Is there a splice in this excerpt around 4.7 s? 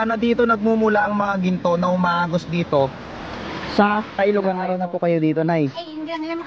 yes; 1 cut; at 4.7 s

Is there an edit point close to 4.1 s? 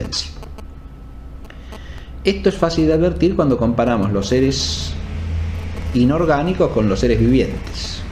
no; 1 cut; at 1.0 s

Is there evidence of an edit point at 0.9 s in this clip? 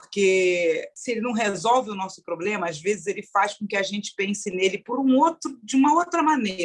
yes; 1 cut; at 0.9 s

